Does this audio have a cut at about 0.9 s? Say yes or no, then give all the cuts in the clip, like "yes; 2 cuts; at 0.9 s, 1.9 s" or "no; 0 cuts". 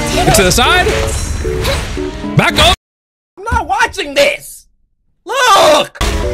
no; 0 cuts